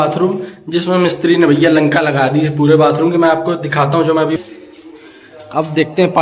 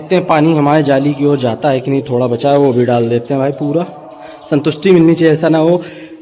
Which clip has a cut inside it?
first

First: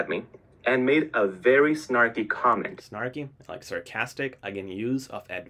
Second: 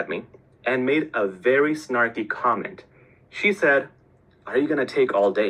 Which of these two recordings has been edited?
second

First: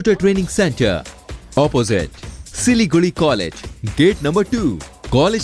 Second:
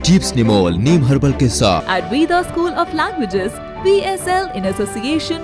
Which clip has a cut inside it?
second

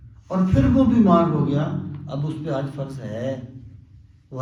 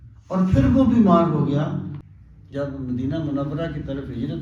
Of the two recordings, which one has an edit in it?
second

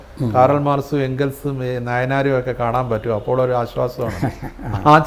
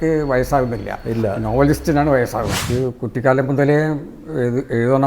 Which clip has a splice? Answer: second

